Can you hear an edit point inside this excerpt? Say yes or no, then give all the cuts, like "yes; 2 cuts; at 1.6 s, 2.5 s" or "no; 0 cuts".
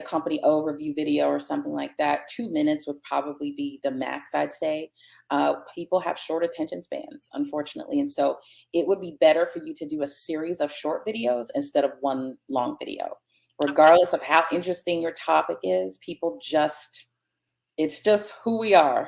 no; 0 cuts